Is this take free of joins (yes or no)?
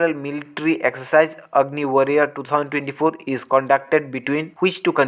yes